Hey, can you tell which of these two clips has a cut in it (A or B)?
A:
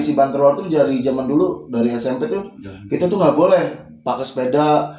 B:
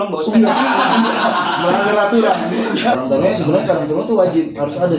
B